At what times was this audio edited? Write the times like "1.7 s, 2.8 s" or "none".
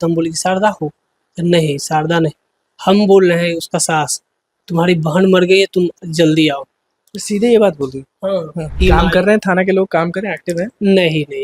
8.8 s